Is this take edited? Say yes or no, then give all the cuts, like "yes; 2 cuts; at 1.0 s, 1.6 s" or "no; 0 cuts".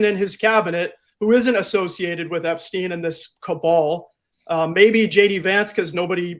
no; 0 cuts